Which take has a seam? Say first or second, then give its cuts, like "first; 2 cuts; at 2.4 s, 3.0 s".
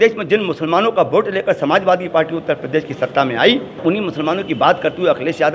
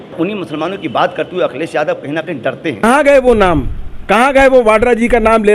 second; 1 cut; at 2.8 s